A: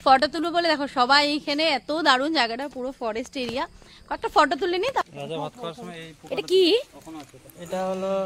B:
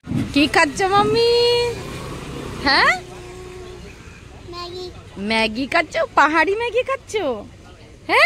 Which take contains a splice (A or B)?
A